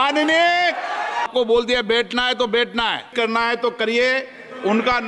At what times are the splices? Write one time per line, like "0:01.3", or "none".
0:01.3
0:03.1